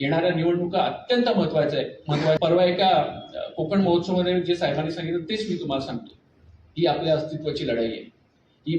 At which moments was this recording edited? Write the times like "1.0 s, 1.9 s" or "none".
2.4 s